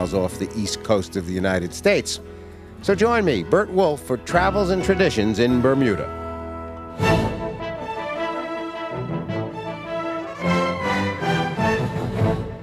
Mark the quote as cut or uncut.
cut